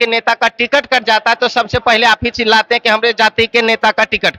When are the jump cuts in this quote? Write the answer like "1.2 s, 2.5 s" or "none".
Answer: none